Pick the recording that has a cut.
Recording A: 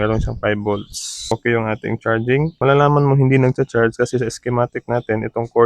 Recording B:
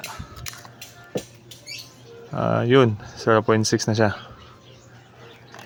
A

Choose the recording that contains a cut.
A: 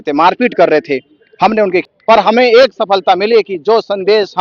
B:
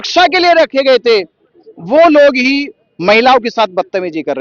A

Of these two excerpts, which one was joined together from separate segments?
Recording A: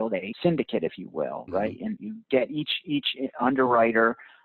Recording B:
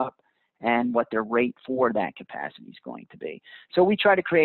A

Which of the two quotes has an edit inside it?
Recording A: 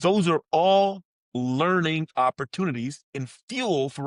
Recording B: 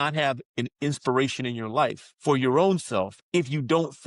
B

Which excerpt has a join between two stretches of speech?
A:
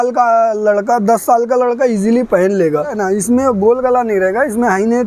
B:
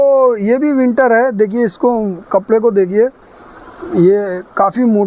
A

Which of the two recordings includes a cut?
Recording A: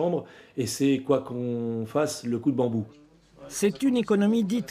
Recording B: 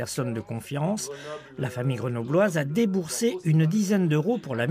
A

